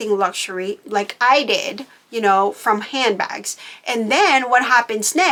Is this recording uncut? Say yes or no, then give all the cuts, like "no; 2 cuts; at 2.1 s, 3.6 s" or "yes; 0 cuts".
yes; 0 cuts